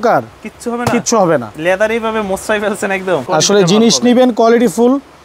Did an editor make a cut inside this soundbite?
yes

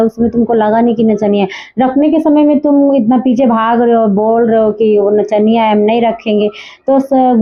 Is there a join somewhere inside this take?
no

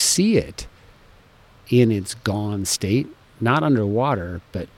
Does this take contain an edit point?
no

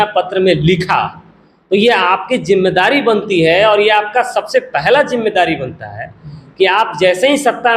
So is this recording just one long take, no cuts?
yes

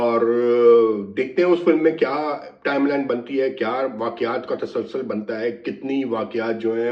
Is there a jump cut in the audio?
no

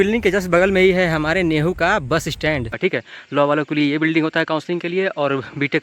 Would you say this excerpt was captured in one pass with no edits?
no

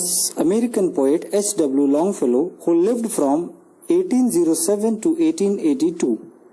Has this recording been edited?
no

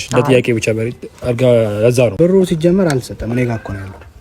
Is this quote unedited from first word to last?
no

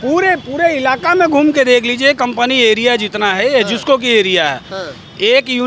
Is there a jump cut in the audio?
no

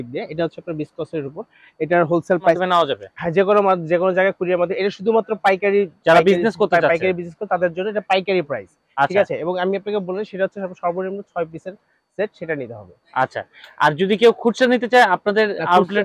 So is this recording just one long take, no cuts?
no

